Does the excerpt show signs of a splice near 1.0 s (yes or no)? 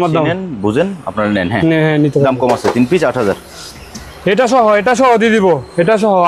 no